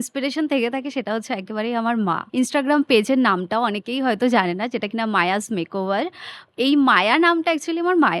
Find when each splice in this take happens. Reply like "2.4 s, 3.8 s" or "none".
2.2 s